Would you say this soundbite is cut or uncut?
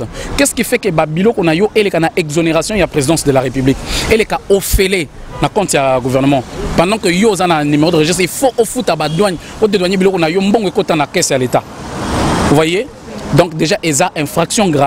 uncut